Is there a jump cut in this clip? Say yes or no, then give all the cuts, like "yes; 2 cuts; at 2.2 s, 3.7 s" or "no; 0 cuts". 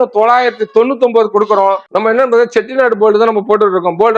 yes; 1 cut; at 1.8 s